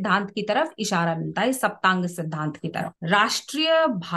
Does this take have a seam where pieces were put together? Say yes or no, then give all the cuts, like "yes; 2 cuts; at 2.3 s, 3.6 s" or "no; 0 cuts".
yes; 1 cut; at 2.9 s